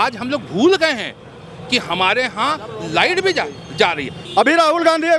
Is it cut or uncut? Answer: cut